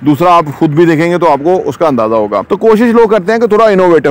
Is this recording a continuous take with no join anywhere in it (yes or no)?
no